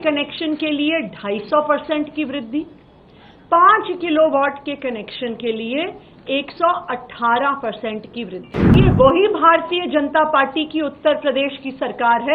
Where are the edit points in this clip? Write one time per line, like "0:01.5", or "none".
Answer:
0:08.8